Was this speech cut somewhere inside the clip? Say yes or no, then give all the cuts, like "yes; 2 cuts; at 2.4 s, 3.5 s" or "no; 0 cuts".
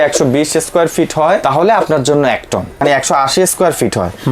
yes; 2 cuts; at 1.4 s, 2.8 s